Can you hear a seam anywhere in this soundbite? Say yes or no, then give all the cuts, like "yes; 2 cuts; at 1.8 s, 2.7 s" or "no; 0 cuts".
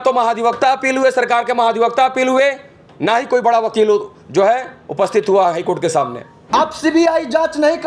yes; 1 cut; at 6.3 s